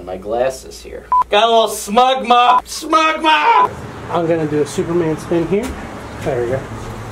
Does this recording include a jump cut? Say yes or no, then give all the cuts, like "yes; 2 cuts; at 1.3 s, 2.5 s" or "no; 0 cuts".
no; 0 cuts